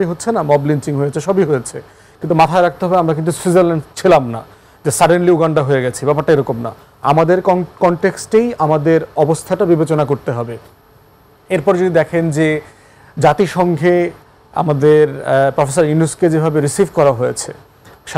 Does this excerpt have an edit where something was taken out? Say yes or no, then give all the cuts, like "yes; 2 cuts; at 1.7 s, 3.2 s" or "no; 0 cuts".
no; 0 cuts